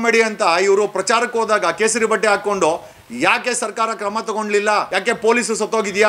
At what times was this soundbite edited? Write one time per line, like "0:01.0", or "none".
0:04.9